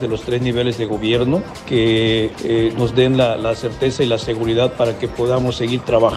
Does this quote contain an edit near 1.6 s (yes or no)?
yes